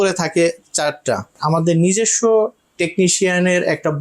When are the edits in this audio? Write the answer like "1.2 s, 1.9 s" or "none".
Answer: 1.3 s